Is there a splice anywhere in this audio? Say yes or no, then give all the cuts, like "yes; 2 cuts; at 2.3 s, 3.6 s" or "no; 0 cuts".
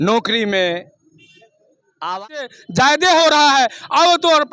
yes; 1 cut; at 2.1 s